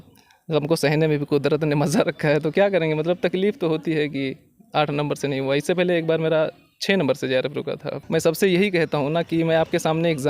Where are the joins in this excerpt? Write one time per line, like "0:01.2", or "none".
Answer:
0:08.0